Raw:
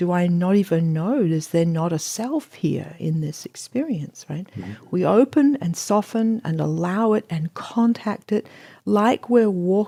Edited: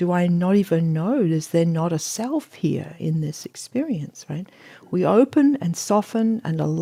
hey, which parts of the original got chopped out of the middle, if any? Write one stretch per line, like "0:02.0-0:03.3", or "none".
none